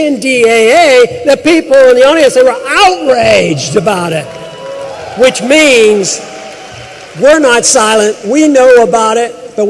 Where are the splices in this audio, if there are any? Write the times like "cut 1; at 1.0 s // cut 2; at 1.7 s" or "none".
cut 1; at 7.5 s